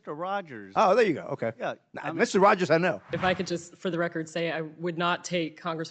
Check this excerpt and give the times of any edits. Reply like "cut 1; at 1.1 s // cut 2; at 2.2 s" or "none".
cut 1; at 3.1 s